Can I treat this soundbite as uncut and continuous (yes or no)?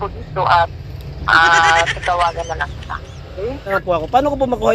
no